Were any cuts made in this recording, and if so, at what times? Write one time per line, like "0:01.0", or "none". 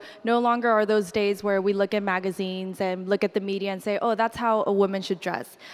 none